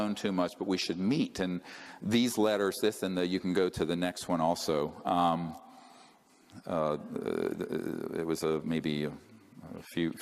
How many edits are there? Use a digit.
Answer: 1